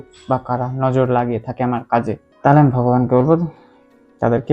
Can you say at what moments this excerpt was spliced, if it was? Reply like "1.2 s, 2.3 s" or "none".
none